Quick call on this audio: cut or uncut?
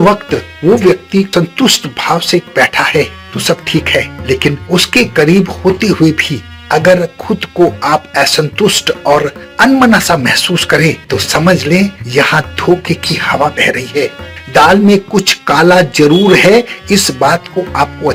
uncut